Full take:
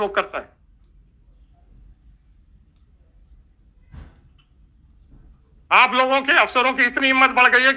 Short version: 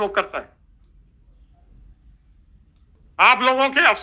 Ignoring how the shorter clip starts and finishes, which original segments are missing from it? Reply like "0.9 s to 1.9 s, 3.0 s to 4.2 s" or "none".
2.9 s to 5.4 s